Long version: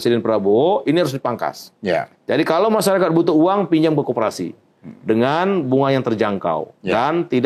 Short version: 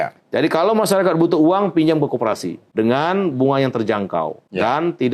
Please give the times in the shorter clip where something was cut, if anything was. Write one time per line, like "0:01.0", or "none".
0:02.6